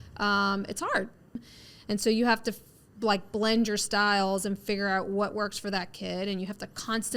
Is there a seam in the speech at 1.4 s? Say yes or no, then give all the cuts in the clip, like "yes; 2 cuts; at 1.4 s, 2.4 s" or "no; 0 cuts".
yes; 1 cut; at 1.4 s